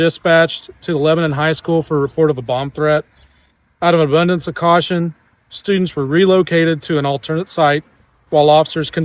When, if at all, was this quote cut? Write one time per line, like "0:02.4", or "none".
none